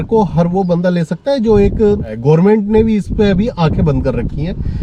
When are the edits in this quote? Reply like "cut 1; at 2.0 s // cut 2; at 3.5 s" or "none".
cut 1; at 2.1 s

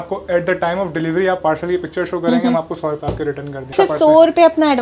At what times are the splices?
cut 1; at 3.7 s

